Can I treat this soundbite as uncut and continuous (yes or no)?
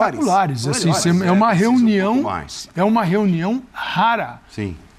yes